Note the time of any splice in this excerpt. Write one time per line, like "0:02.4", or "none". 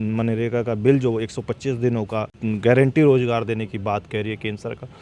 0:02.3